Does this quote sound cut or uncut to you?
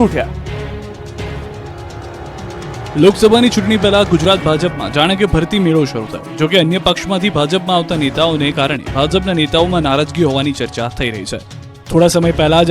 cut